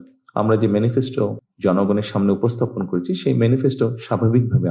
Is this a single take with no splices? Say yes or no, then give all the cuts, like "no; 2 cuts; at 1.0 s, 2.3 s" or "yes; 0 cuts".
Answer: no; 1 cut; at 1.4 s